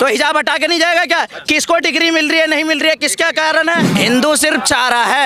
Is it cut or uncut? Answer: cut